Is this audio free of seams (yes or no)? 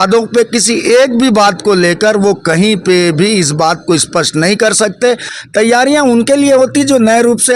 no